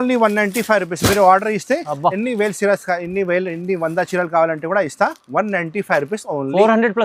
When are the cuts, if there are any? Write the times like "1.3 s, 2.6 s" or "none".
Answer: none